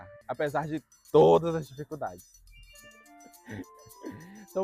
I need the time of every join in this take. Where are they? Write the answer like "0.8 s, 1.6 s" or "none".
none